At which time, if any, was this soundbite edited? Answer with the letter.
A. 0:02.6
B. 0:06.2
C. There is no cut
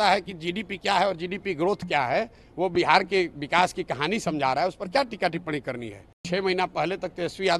B